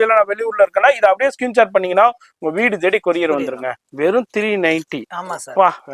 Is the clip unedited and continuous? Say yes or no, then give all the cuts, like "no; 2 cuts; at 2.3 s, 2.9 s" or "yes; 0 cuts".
no; 1 cut; at 3.7 s